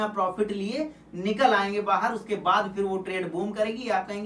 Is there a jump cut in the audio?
no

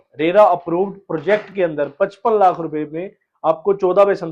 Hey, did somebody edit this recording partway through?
no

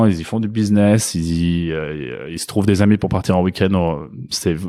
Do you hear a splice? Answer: no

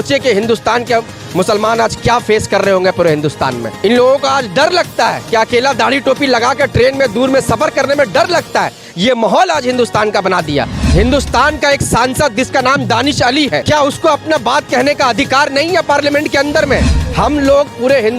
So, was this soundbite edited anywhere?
yes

